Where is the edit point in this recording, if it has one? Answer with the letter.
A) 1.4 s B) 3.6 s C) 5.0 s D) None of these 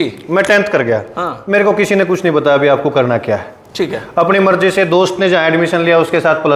D